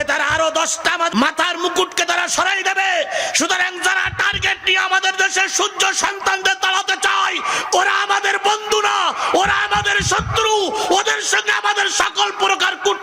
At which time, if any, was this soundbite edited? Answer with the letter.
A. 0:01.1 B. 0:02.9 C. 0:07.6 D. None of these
A